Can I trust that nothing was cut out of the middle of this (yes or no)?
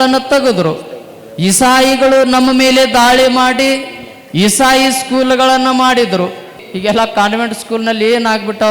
no